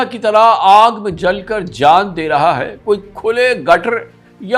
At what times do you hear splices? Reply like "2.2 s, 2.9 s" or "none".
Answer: none